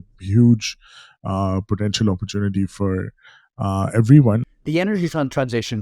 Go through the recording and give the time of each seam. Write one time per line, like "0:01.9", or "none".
0:04.4

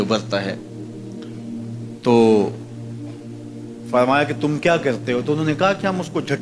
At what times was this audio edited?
0:02.6
0:03.9

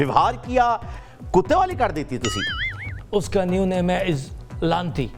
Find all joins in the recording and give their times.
0:00.9
0:02.9

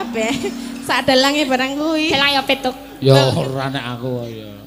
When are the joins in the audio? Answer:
none

